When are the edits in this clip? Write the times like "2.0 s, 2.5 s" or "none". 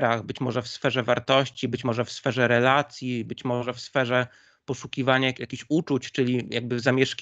5.5 s